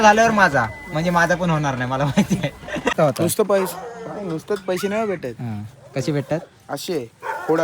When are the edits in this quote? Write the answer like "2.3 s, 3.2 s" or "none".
2.9 s

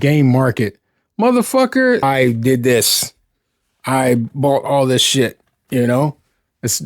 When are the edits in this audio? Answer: 2.0 s

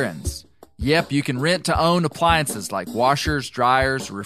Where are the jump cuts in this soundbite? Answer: none

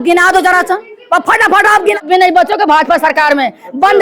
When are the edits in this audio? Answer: 2.0 s

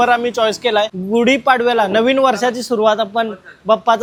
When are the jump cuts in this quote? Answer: none

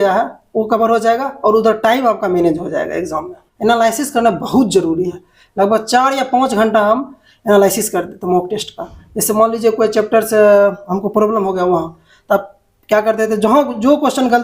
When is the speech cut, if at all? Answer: 3.4 s

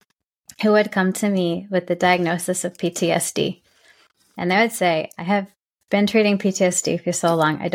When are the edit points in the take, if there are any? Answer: none

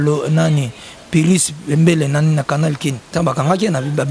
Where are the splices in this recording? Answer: 3.0 s

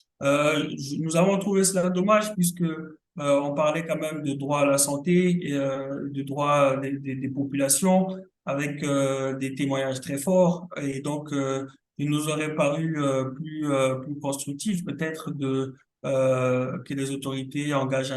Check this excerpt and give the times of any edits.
none

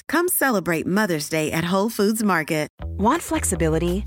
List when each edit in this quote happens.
2.8 s

